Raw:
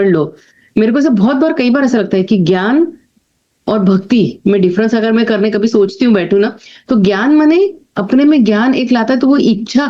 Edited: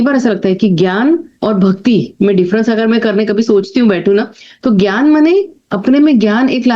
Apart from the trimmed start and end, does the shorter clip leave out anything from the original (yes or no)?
yes